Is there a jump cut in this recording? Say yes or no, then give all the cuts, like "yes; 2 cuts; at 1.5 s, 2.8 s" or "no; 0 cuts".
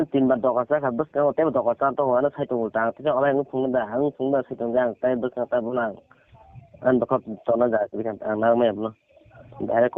no; 0 cuts